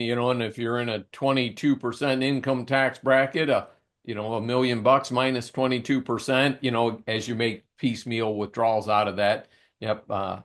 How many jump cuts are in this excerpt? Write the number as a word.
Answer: zero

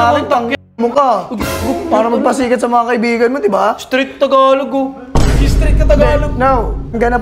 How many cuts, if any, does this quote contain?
zero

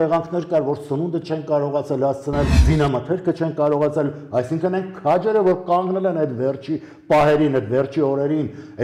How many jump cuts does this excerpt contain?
one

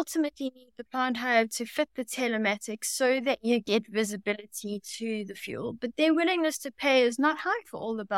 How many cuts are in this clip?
zero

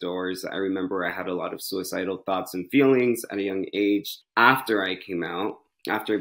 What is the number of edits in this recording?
one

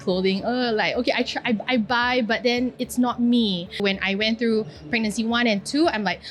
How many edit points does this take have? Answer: one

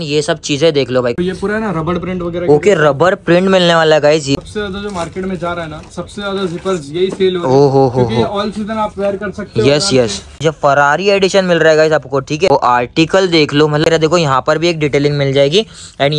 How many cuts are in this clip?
five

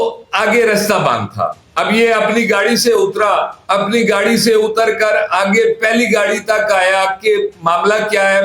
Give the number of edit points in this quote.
zero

